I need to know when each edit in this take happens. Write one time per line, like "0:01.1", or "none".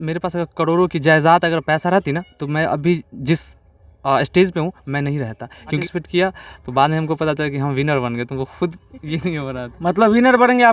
0:05.8